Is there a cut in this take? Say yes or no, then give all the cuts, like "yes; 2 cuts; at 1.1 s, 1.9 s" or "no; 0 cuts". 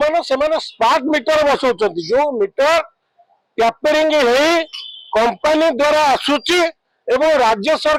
no; 0 cuts